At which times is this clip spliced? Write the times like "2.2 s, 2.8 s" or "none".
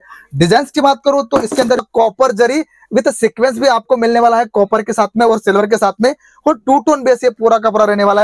1.8 s